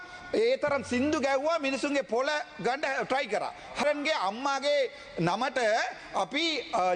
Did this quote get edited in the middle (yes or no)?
yes